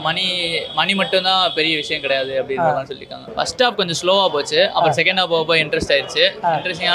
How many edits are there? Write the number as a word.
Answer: one